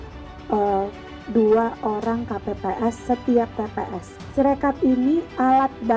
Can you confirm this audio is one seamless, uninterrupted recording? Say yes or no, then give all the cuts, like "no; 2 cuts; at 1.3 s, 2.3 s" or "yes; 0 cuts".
no; 1 cut; at 4.1 s